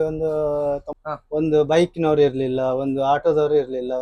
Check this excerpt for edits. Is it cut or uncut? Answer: cut